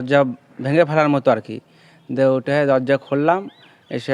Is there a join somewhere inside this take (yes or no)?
no